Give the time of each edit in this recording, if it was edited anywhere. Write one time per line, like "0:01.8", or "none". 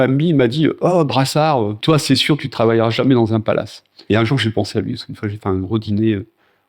0:01.8
0:04.0